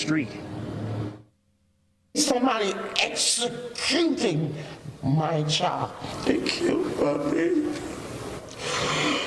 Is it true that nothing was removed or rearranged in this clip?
yes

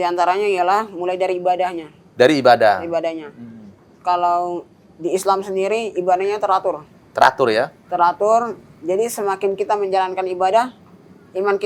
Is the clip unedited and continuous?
yes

